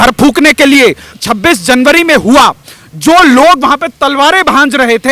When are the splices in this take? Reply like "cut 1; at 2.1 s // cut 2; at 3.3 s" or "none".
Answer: cut 1; at 1.1 s